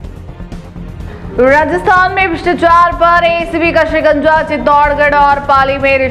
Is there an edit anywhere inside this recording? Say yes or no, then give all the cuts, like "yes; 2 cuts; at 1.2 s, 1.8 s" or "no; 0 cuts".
yes; 1 cut; at 1.0 s